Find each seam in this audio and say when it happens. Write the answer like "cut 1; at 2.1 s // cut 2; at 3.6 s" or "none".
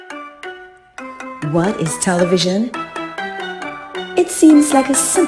cut 1; at 1.4 s